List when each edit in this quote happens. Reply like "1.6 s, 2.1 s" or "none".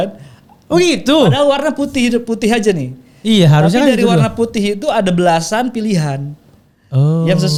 none